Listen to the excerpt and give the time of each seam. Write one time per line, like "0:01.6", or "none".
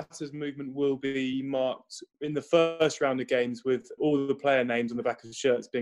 none